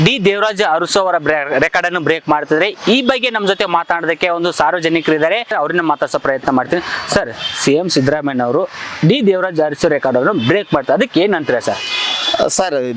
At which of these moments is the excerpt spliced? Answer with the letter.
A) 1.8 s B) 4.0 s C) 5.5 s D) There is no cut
C